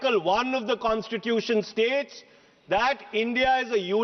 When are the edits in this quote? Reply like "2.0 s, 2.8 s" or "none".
none